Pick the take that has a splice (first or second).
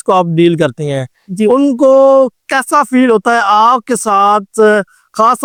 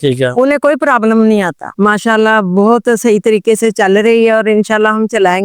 second